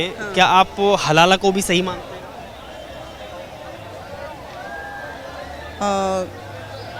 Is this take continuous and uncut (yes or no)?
yes